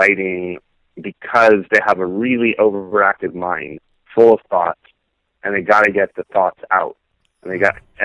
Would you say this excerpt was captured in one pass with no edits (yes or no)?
yes